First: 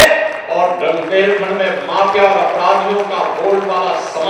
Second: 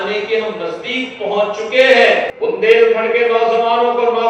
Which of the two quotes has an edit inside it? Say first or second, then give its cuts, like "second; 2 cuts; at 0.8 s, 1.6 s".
second; 1 cut; at 2.3 s